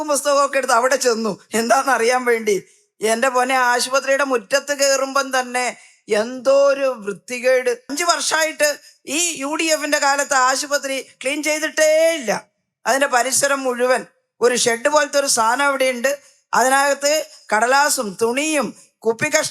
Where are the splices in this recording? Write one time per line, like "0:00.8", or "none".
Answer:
0:07.9